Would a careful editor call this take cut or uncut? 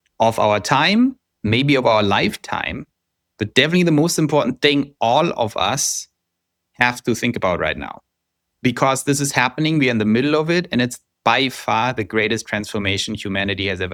uncut